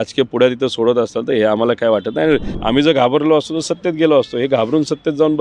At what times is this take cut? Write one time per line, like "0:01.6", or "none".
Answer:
0:02.5